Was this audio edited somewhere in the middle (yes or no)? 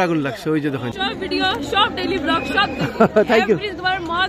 yes